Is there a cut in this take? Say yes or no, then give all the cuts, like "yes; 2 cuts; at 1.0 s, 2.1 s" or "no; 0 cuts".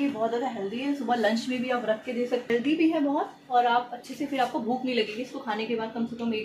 yes; 1 cut; at 2.5 s